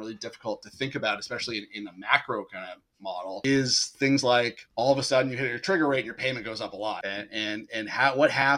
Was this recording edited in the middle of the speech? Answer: yes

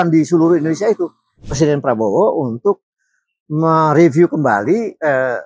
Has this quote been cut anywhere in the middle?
yes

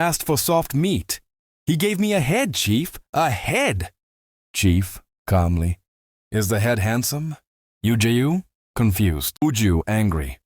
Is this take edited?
yes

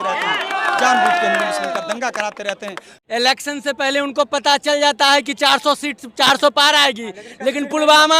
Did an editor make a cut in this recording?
yes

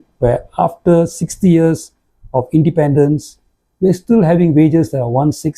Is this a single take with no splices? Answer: yes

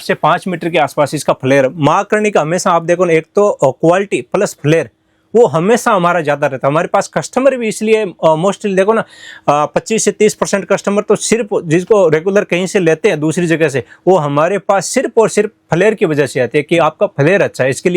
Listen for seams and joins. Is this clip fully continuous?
yes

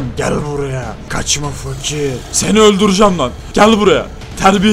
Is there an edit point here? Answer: yes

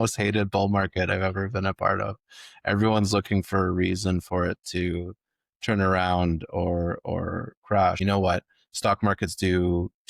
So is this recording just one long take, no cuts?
no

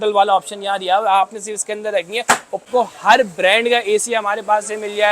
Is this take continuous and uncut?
no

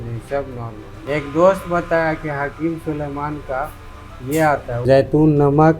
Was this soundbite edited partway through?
yes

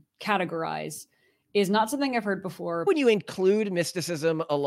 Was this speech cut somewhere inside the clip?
yes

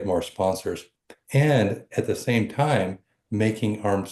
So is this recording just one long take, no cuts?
yes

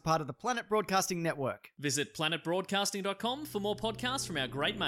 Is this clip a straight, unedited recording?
yes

